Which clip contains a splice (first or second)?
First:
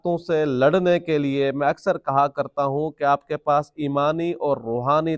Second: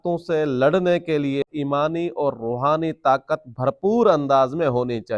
second